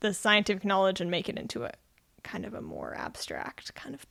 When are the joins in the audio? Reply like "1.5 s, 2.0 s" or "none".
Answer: none